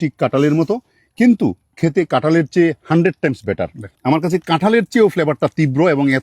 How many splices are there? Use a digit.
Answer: 1